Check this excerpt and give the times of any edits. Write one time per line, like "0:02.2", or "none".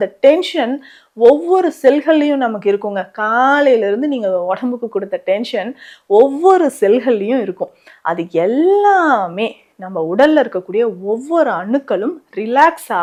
none